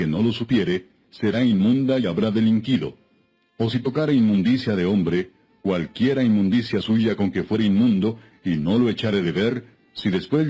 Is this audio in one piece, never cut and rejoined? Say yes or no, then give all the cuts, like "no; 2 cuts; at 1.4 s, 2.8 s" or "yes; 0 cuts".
yes; 0 cuts